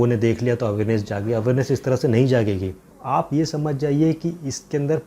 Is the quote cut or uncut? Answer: cut